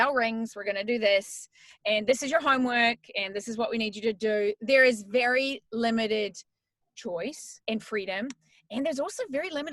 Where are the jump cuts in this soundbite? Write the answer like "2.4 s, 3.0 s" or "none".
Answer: 7.5 s